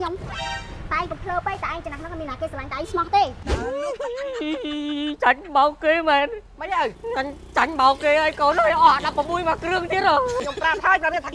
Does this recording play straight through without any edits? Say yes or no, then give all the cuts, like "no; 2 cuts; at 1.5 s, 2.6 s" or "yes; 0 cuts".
no; 3 cuts; at 3.4 s, 7.0 s, 10.4 s